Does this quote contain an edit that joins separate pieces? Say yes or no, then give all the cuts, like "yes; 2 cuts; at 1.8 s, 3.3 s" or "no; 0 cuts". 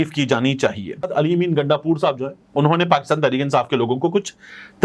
yes; 1 cut; at 1.1 s